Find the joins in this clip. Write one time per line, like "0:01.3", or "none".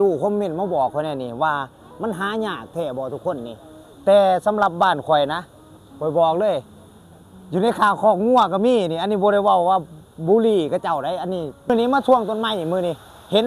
0:11.7